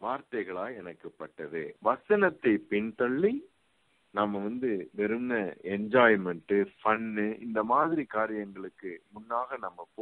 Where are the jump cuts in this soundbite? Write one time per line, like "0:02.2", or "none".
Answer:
0:01.7